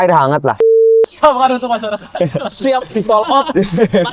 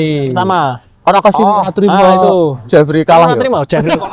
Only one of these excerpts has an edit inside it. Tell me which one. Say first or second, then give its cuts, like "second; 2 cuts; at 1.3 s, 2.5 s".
first; 1 cut; at 0.9 s